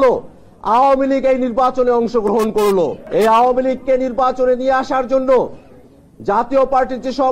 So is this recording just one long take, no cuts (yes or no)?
no